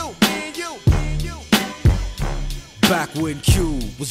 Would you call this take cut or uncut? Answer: uncut